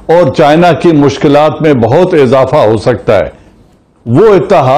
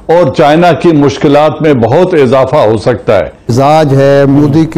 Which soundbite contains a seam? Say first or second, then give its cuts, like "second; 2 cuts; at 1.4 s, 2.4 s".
second; 1 cut; at 3.5 s